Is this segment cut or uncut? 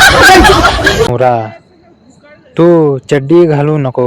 cut